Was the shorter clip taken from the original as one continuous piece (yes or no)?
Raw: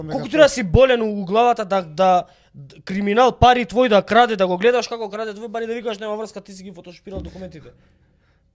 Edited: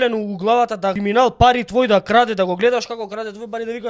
no